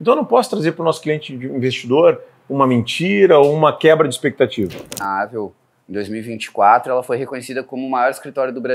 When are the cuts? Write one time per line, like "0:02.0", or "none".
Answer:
0:05.0

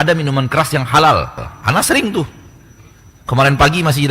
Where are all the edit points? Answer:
0:01.5

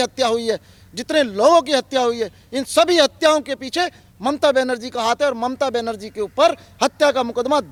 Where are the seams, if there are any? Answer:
none

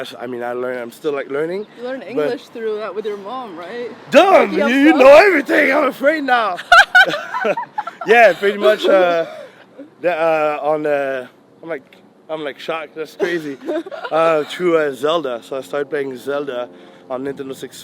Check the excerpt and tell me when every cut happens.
none

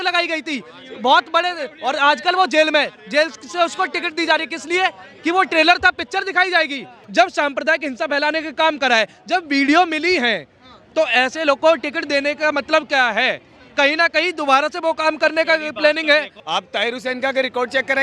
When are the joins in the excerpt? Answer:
0:07.0
0:16.4

